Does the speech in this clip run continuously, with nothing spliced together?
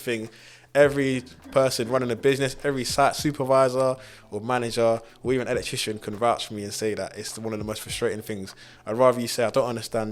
yes; 0 cuts

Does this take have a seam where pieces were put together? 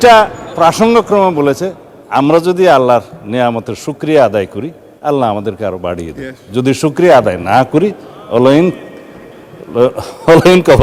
no; 0 cuts

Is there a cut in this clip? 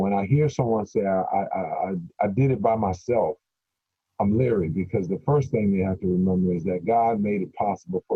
no; 0 cuts

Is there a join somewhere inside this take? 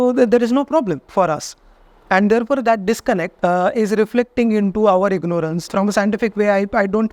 yes; 3 cuts; at 1.0 s, 3.3 s, 5.6 s

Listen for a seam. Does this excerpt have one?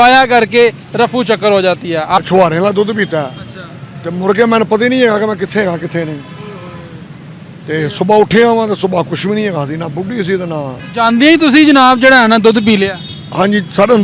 yes; 2 cuts; at 2.2 s, 10.8 s

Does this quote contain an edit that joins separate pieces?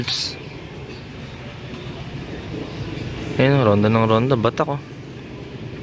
no; 0 cuts

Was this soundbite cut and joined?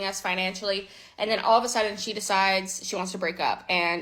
no; 0 cuts

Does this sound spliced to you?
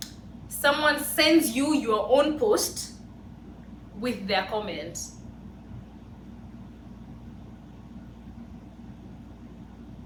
no; 0 cuts

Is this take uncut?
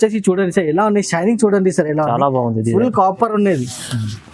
yes; 0 cuts

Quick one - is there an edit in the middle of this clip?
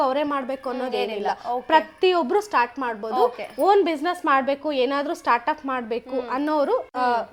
no; 0 cuts

